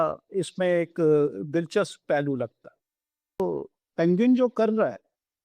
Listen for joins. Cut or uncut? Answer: cut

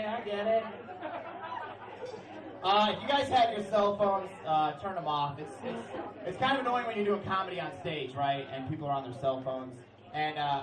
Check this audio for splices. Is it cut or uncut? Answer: uncut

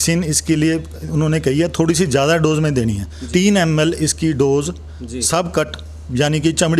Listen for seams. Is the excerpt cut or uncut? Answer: cut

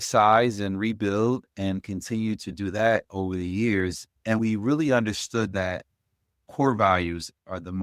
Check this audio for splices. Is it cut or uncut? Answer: uncut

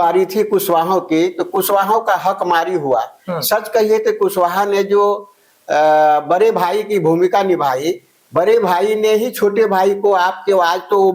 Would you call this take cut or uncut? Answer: uncut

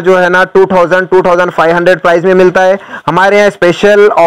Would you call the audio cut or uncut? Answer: uncut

